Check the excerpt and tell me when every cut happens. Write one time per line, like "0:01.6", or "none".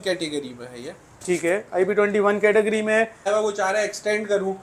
0:03.3